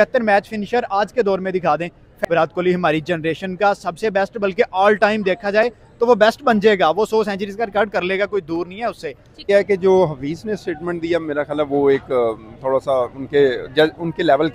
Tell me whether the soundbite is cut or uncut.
cut